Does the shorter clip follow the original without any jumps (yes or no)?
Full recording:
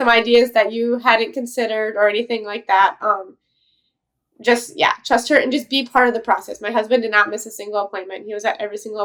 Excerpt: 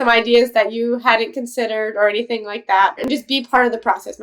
no